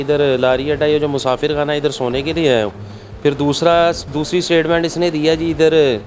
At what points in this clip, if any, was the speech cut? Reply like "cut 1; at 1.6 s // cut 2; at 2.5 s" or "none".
none